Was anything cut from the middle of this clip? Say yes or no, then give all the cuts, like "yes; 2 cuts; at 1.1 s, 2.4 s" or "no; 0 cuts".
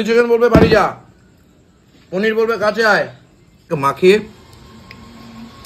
yes; 1 cut; at 3.6 s